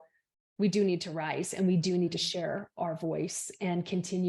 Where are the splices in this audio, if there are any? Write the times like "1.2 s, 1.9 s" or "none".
none